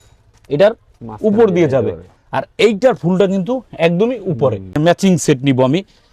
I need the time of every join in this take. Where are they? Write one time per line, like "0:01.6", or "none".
0:04.8